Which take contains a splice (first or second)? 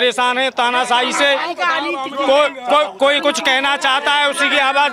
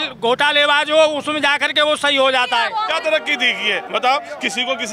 second